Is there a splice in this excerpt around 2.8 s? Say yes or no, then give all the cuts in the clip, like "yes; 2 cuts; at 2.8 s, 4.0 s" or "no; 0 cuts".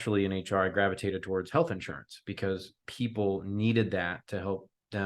yes; 1 cut; at 2.8 s